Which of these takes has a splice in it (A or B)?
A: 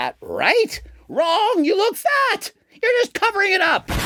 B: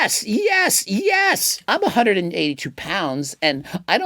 B